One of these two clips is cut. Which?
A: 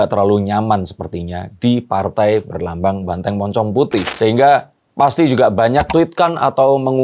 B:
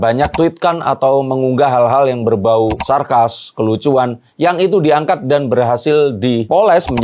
A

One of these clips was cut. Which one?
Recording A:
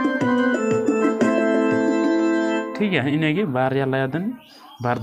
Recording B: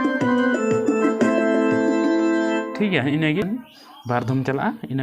B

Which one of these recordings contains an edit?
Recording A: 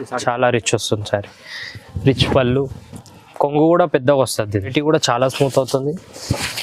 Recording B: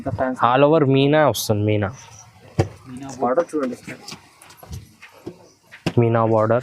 A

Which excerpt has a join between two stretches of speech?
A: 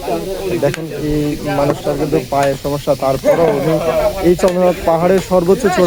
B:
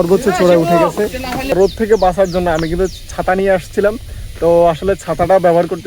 B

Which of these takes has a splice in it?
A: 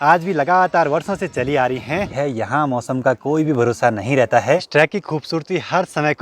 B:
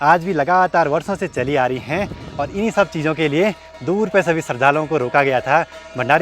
A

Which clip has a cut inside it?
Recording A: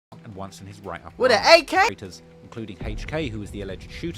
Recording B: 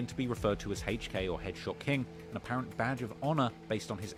A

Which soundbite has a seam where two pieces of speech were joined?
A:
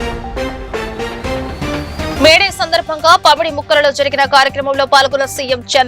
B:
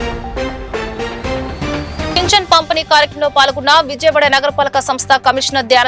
A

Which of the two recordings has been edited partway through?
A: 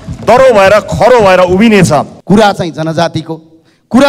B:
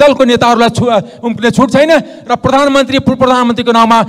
A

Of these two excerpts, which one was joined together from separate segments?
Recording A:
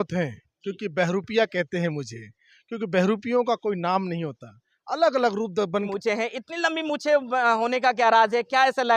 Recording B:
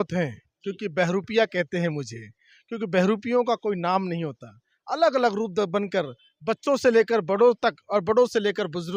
A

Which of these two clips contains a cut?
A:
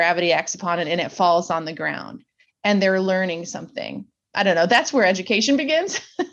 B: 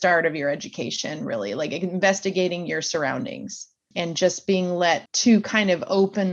B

